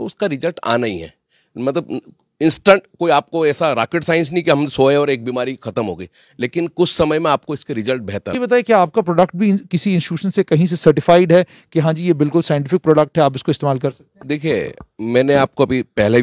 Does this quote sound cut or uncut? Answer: cut